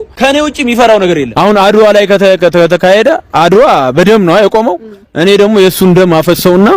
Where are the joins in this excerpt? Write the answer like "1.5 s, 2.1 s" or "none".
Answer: 1.3 s